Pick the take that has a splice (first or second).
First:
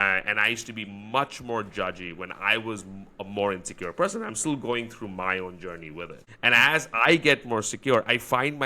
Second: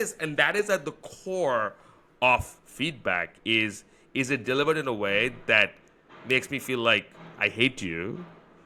first